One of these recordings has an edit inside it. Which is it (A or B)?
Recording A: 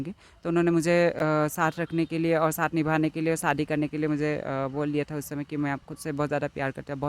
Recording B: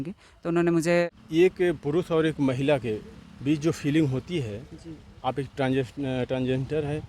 B